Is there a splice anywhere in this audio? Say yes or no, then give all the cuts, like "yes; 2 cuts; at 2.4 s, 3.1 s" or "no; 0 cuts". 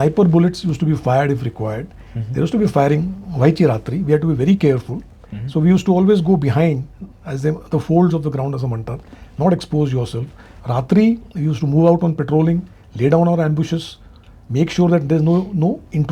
no; 0 cuts